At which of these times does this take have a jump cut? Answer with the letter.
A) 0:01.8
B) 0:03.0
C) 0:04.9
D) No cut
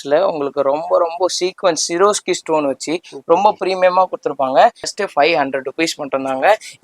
C